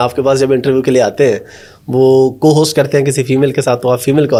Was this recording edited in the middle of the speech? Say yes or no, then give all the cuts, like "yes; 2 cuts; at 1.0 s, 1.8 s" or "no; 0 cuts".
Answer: no; 0 cuts